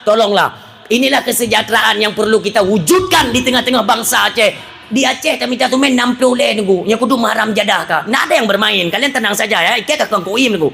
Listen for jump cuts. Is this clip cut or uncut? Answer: cut